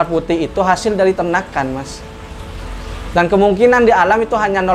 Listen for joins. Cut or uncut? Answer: uncut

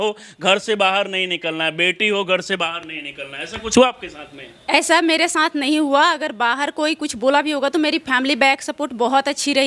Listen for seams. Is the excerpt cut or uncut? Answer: uncut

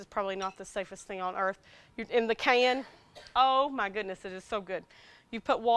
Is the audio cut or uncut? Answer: cut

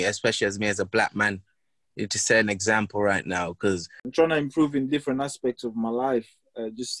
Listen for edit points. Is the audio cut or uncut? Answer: cut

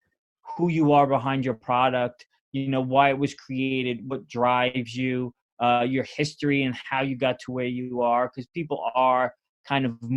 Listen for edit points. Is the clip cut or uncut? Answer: uncut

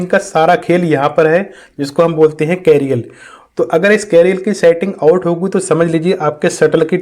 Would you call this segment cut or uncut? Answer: uncut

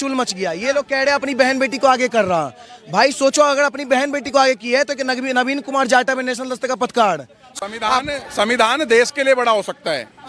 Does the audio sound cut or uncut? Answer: cut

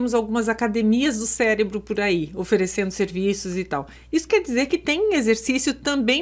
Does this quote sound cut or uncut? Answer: uncut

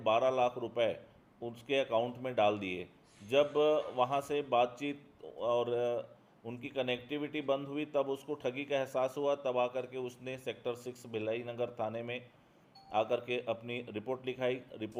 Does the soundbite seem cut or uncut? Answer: uncut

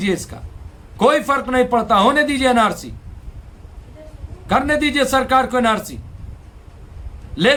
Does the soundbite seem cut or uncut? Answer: uncut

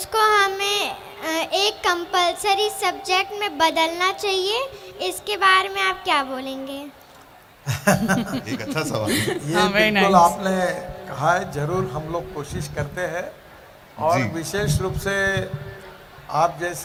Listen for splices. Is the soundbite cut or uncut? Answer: uncut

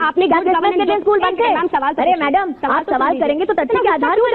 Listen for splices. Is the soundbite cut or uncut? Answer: uncut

